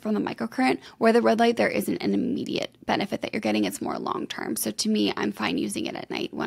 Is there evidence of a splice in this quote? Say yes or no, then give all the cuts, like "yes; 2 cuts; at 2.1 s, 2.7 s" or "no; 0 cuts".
no; 0 cuts